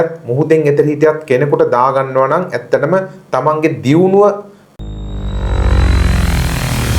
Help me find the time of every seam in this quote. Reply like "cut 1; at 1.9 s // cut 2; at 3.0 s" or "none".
cut 1; at 4.7 s